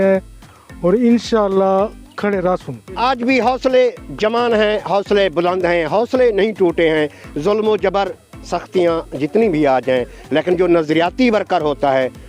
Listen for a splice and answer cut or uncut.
cut